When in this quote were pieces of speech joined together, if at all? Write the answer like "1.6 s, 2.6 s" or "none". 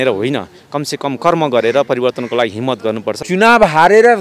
3.2 s